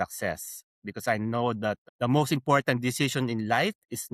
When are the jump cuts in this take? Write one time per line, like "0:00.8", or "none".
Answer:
0:01.8